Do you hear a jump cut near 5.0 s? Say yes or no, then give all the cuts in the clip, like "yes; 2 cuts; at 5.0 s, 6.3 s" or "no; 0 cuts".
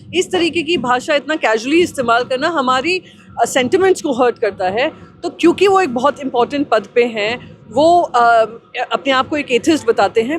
no; 0 cuts